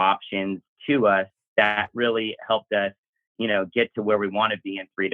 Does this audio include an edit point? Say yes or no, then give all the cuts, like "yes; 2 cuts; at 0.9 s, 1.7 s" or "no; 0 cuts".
yes; 1 cut; at 1.4 s